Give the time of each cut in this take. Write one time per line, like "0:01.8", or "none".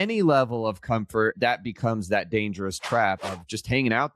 0:01.3
0:03.3